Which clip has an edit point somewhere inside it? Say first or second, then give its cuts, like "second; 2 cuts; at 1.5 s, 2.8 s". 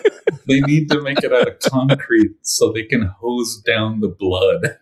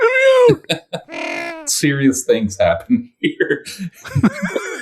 second; 1 cut; at 1.2 s